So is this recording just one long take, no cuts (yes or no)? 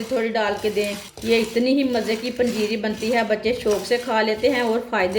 no